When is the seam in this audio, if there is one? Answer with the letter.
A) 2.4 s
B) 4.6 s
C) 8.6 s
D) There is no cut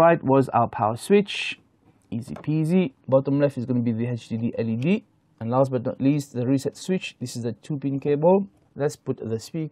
C